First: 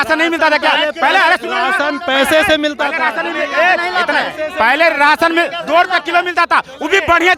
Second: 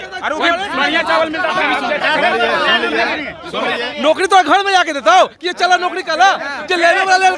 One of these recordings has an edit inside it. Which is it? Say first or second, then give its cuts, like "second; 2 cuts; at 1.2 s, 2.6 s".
second; 1 cut; at 3.8 s